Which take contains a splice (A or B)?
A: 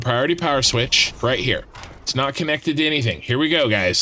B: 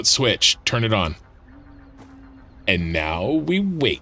B